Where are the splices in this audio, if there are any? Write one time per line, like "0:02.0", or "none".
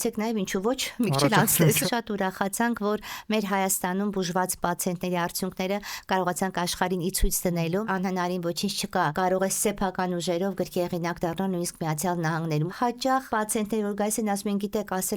0:01.8
0:07.8
0:12.7